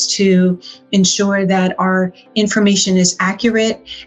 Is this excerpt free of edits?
yes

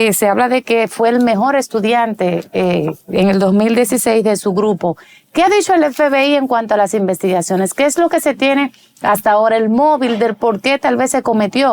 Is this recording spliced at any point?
no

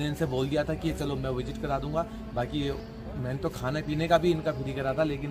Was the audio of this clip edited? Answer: no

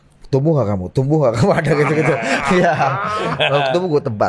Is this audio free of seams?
yes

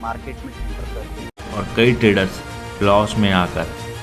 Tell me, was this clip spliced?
yes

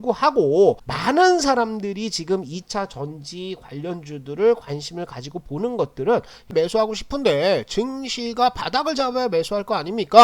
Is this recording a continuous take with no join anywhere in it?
no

